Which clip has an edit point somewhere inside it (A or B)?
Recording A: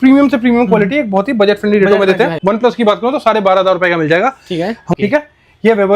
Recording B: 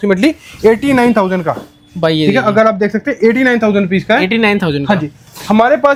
A